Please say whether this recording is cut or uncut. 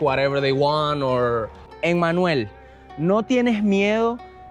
cut